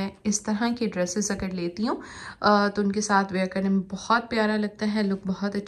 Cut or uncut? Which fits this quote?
uncut